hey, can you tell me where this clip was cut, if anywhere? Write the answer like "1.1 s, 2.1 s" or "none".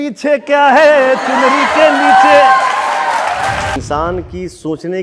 3.8 s